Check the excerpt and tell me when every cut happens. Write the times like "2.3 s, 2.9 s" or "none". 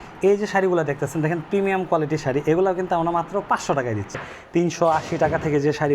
4.2 s